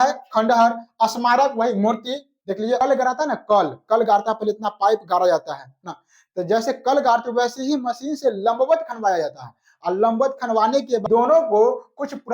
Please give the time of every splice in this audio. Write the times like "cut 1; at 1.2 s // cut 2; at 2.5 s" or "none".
cut 1; at 2.8 s // cut 2; at 11.0 s